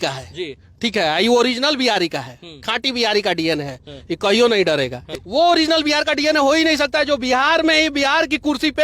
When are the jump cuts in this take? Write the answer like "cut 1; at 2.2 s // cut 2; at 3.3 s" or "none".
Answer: cut 1; at 5.0 s

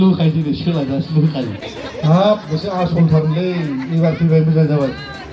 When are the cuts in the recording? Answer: cut 1; at 1.7 s

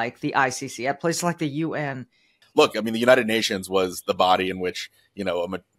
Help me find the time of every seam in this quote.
cut 1; at 2.3 s

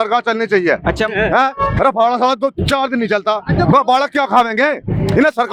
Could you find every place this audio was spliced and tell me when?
none

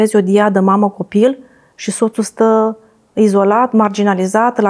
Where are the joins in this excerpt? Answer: none

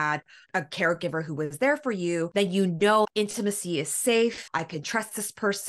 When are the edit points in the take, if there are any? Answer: cut 1; at 2.3 s // cut 2; at 3.1 s // cut 3; at 4.4 s

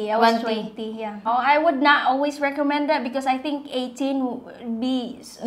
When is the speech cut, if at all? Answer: cut 1; at 1.3 s

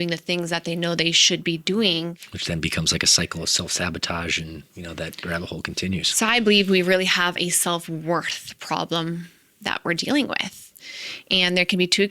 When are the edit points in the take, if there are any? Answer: cut 1; at 2.3 s

